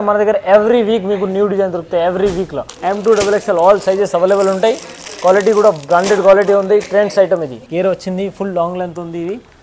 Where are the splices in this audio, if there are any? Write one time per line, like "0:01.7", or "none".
0:02.6
0:07.6